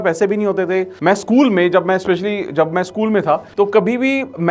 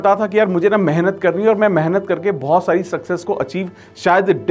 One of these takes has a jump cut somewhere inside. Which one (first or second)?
first